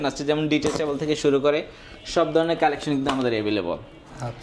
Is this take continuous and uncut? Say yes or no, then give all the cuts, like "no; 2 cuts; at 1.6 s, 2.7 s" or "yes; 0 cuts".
yes; 0 cuts